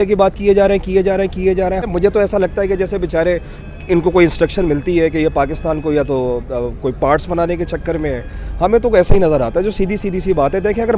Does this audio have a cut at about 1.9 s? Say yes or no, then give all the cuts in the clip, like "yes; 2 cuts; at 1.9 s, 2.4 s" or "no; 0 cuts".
yes; 1 cut; at 1.9 s